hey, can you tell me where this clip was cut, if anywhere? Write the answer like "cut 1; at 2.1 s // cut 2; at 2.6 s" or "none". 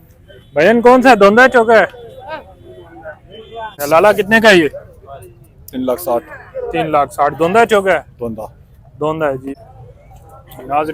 cut 1; at 3.7 s // cut 2; at 9.5 s